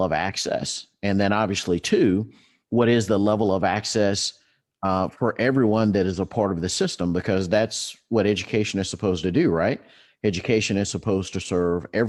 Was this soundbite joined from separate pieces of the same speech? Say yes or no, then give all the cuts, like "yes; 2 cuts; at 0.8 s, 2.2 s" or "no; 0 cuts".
no; 0 cuts